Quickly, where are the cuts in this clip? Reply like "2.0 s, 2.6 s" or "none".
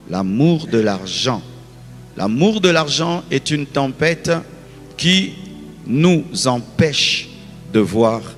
none